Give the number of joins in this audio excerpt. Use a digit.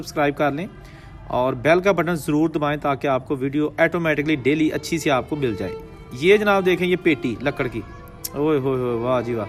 0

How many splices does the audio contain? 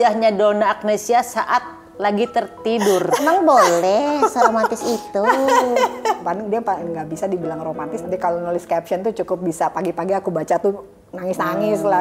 3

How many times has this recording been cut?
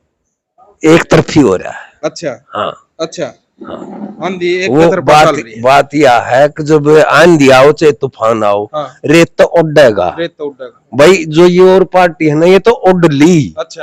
0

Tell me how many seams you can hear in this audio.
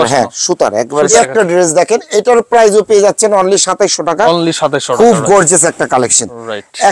1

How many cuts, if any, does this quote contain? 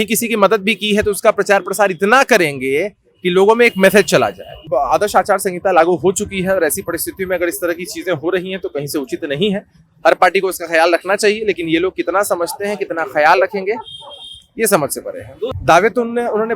2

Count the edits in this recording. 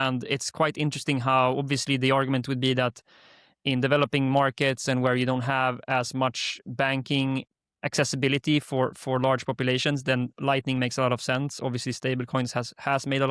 1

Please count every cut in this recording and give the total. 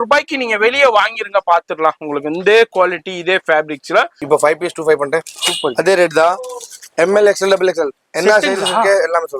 1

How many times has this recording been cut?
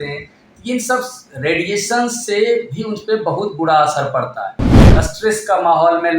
1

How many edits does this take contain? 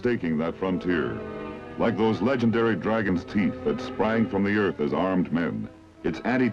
1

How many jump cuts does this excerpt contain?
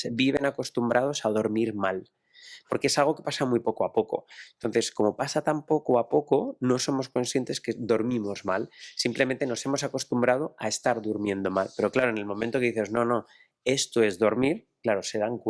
0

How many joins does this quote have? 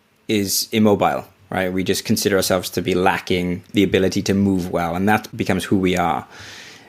2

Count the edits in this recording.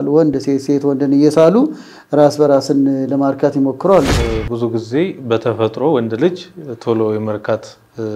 1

